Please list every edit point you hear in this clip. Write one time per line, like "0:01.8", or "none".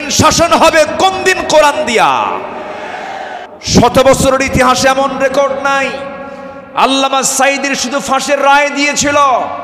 0:03.4

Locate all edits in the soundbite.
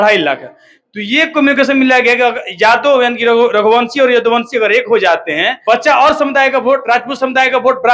0:05.5

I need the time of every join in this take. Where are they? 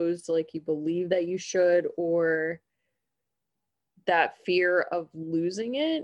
none

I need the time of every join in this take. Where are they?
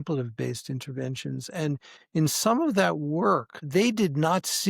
0:03.6

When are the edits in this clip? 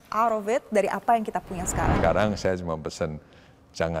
0:01.9

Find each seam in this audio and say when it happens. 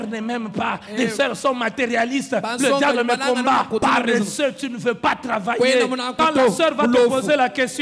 0:03.8
0:06.1

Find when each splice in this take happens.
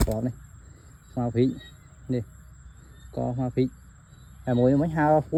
none

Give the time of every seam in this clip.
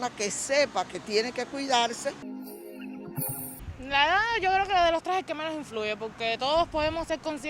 0:02.3
0:03.6

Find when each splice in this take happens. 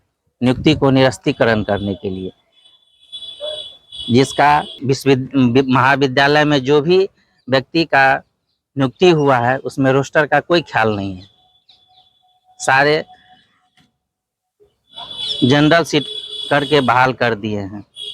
0:04.7

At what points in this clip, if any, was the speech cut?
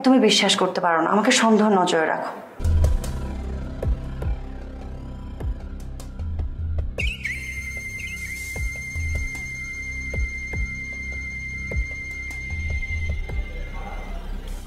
0:02.6

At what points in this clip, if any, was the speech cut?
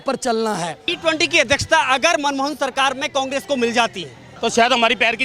0:00.9
0:04.3

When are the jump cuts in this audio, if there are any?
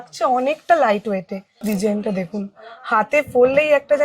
0:01.6

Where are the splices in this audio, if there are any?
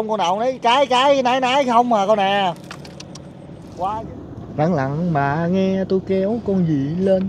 0:03.7

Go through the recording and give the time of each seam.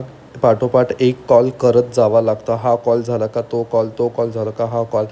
none

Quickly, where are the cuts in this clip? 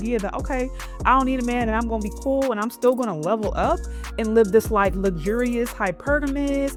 none

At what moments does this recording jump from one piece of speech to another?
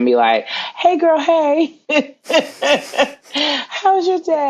none

